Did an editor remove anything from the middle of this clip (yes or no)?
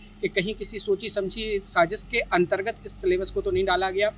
no